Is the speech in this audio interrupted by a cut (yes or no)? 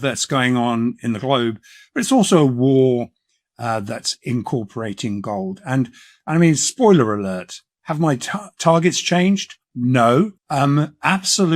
yes